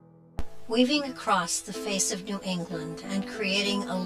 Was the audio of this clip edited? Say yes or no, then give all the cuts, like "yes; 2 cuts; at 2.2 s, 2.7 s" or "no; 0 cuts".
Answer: yes; 1 cut; at 3.0 s